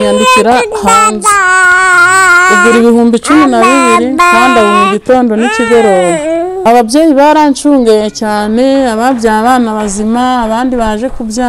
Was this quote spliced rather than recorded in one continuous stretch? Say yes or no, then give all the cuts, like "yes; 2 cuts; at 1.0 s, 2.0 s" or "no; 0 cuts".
yes; 1 cut; at 6.5 s